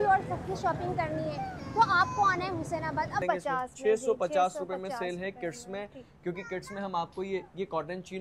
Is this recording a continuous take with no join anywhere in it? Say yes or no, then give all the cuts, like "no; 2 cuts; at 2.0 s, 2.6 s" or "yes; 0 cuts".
no; 1 cut; at 3.2 s